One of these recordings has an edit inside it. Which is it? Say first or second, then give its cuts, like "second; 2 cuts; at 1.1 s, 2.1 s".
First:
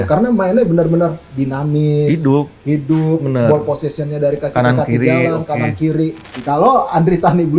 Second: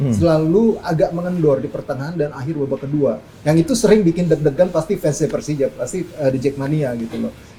first; 1 cut; at 6.3 s